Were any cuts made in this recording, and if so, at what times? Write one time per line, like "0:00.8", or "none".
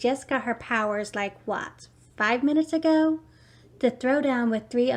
none

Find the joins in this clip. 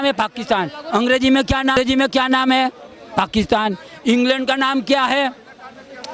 0:01.8

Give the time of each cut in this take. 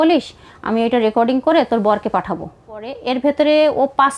0:03.0

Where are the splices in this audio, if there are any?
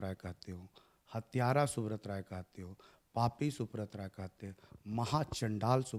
none

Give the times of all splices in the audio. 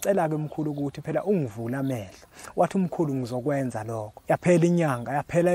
0:04.1

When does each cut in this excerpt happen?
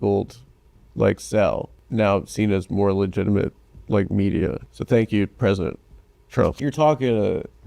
0:01.8
0:04.6
0:06.6

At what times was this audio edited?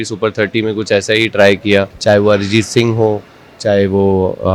0:01.9

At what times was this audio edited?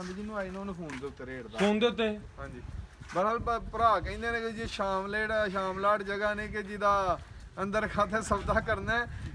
none

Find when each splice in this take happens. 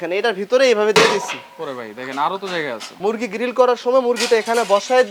0:03.0

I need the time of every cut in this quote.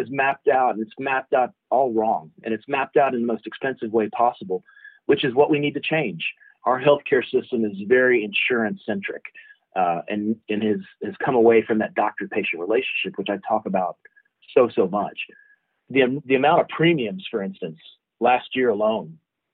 0:06.5
0:15.8

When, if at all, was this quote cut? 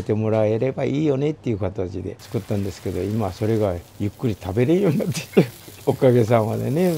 0:02.2
0:05.6

